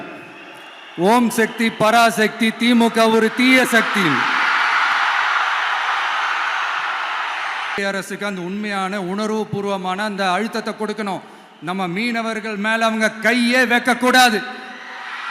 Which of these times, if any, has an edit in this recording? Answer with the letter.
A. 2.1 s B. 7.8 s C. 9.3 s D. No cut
B